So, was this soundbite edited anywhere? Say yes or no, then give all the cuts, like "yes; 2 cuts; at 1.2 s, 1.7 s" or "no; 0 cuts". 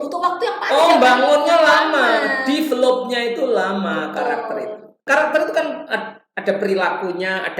yes; 1 cut; at 4.9 s